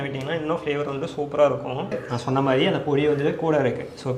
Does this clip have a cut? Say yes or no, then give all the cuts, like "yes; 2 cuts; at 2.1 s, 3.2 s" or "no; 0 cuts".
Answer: yes; 1 cut; at 2.0 s